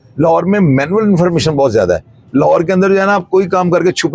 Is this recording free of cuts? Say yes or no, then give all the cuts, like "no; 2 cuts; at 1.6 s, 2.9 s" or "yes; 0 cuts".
yes; 0 cuts